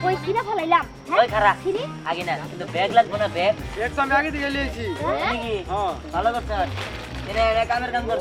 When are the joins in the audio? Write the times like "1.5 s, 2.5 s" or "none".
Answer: none